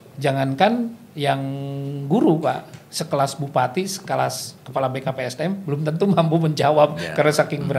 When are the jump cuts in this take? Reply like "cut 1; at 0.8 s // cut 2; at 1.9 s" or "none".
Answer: none